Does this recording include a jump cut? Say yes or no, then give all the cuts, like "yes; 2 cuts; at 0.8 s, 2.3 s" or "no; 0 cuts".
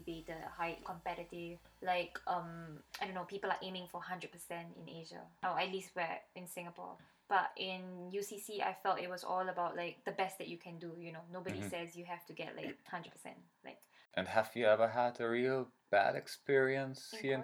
yes; 2 cuts; at 12.8 s, 13.9 s